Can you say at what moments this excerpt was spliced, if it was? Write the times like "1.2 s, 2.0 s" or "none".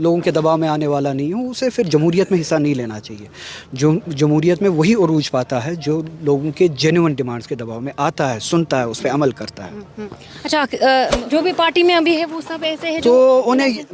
11.2 s